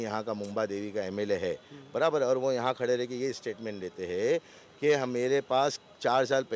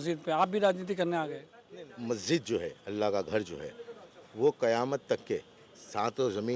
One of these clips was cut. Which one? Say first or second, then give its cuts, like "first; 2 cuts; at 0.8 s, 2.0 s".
second; 1 cut; at 1.6 s